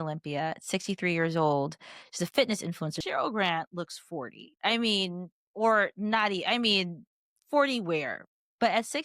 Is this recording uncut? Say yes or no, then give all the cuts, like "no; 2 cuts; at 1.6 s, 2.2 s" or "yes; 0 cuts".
no; 1 cut; at 3.0 s